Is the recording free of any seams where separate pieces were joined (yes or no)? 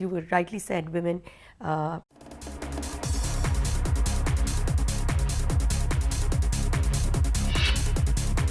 yes